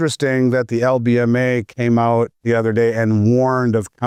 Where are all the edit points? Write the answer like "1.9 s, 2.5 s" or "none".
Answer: none